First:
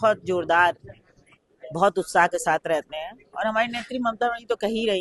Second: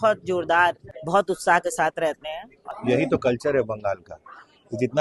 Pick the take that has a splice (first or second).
second